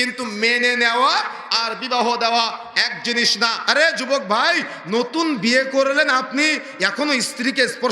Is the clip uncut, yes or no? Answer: no